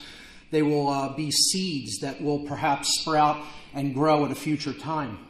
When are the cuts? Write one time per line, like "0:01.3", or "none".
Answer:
0:01.2